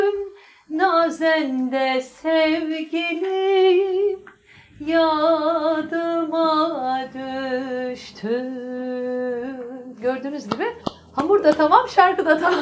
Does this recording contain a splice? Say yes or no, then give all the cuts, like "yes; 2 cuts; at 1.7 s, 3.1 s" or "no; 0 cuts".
no; 0 cuts